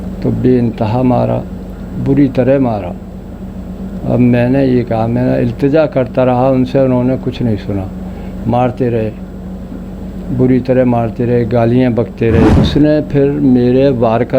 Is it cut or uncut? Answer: cut